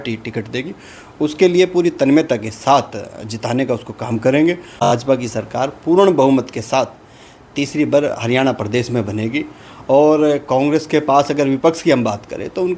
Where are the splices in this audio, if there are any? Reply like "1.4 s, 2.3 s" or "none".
4.8 s